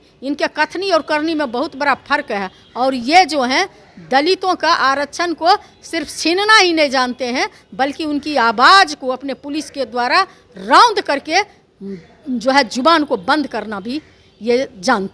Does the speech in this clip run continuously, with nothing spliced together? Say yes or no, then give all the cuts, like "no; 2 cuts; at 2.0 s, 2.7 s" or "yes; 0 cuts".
yes; 0 cuts